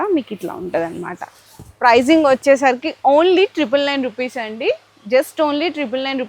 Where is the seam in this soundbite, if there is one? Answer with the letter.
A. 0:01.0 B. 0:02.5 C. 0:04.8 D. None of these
D